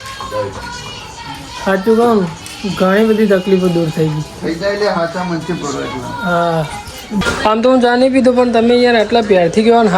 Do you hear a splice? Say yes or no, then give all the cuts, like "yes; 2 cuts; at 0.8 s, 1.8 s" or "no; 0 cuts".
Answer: yes; 1 cut; at 7.2 s